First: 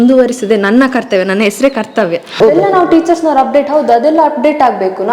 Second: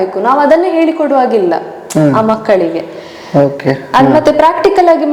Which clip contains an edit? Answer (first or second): first